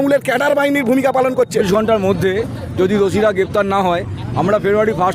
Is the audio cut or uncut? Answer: cut